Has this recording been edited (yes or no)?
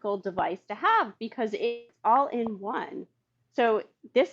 yes